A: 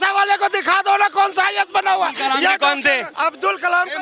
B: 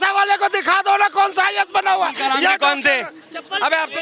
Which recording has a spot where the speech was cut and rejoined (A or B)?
A